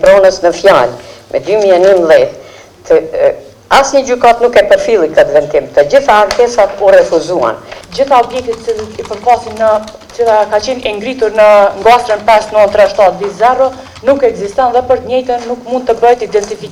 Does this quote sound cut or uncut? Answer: uncut